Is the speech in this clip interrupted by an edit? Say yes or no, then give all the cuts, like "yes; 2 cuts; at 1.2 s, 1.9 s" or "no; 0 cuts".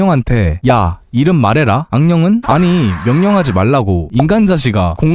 no; 0 cuts